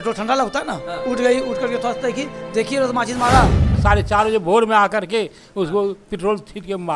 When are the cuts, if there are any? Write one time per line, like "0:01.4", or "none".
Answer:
0:03.8

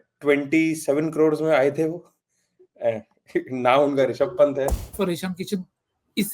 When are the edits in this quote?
0:04.8

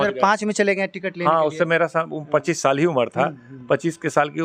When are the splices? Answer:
none

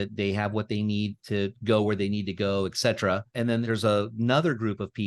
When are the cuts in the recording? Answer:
0:03.6

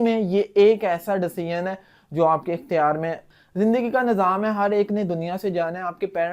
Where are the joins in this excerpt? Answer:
0:03.4

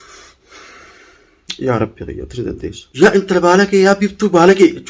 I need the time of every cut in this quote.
0:02.8

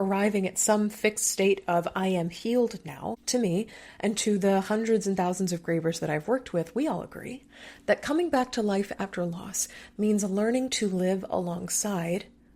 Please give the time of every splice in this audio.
0:03.2

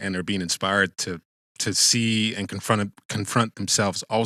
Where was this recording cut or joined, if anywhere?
none

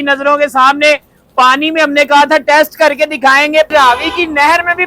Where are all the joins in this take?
0:03.7

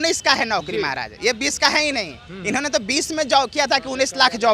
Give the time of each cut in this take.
none

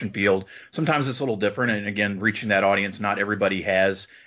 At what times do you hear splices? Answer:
none

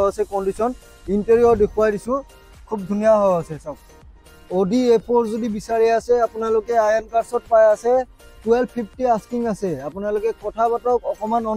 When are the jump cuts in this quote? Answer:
0:04.4

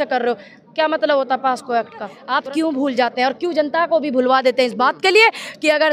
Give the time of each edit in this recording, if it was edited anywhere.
0:02.2

